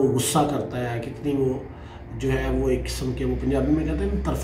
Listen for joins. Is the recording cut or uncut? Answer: uncut